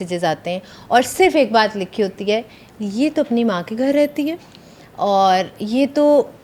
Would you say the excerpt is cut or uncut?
uncut